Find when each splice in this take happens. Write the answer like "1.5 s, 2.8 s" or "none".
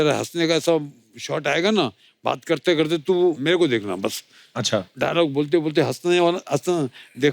3.4 s, 4.9 s

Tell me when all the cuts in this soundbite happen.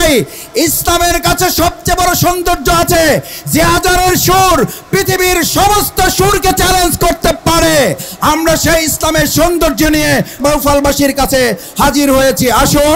10.4 s

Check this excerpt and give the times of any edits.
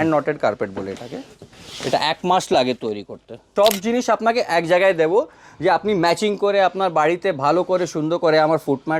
3.4 s

